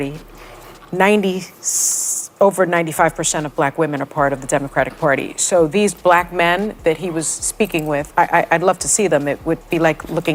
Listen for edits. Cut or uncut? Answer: uncut